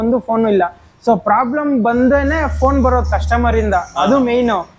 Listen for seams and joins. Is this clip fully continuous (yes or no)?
yes